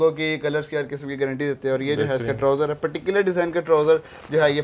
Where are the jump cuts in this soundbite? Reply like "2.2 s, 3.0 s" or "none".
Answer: none